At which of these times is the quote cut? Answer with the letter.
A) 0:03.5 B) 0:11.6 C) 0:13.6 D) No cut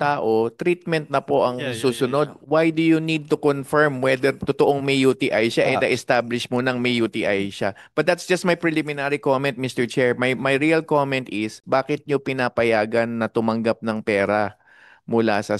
B